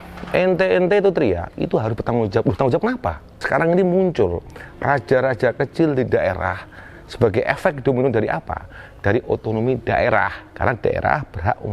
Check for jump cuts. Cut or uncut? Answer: cut